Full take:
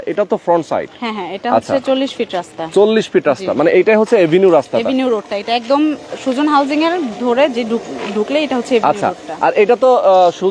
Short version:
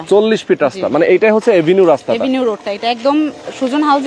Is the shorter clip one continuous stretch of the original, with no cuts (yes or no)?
yes